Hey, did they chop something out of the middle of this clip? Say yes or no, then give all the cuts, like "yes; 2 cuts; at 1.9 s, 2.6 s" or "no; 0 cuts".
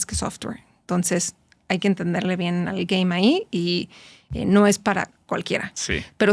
no; 0 cuts